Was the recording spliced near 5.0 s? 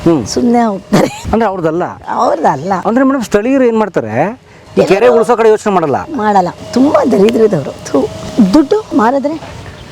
no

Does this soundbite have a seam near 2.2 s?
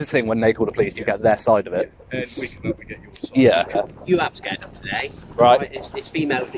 no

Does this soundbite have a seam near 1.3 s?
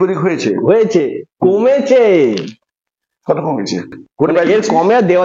no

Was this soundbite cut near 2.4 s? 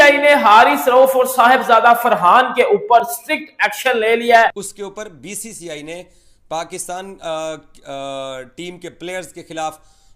no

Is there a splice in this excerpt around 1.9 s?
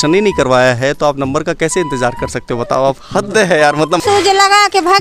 no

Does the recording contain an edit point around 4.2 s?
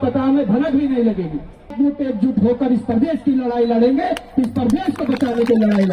no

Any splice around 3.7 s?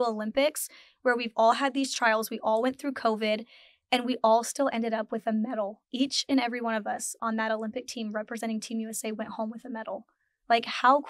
no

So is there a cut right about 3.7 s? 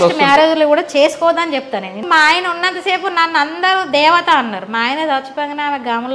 no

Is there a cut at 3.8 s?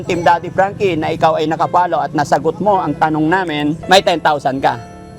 yes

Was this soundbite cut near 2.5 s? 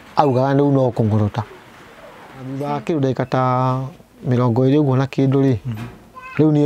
yes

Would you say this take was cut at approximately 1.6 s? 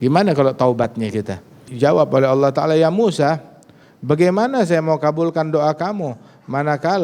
yes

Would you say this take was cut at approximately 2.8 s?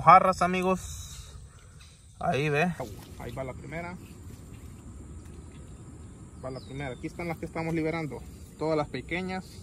yes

